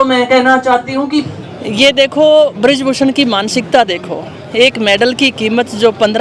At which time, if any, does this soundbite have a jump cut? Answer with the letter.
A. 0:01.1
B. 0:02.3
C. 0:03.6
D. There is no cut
A